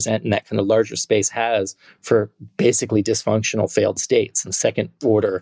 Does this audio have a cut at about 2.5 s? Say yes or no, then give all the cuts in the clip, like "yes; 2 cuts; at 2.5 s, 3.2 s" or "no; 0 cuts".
no; 1 cut; at 4.4 s